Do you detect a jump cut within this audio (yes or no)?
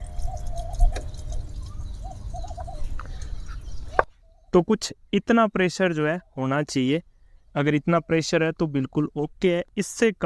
no